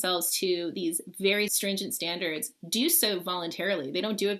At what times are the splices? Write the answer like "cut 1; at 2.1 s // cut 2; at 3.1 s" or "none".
cut 1; at 1.5 s